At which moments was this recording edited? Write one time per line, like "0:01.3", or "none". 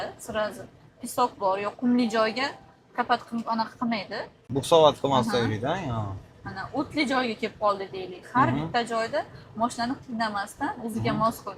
none